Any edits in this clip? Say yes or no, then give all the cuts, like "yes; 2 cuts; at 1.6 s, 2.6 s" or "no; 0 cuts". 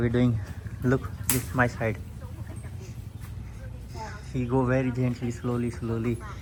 no; 0 cuts